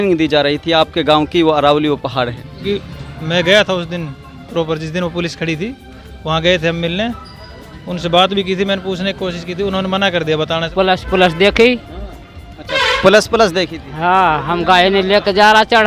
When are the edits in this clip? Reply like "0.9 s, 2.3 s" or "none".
2.5 s, 10.7 s